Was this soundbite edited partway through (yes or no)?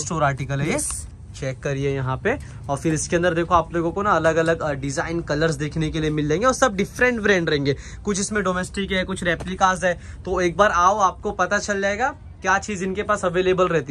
no